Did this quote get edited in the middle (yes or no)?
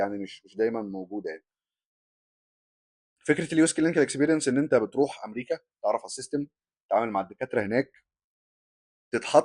no